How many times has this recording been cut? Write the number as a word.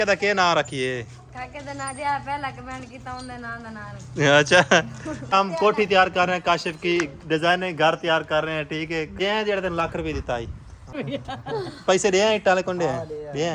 four